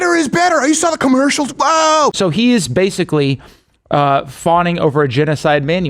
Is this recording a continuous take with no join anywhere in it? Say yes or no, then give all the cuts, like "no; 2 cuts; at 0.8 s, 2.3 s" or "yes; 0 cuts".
no; 1 cut; at 2.2 s